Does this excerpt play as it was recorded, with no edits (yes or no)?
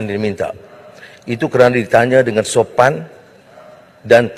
yes